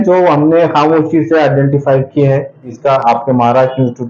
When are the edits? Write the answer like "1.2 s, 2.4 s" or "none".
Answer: 2.7 s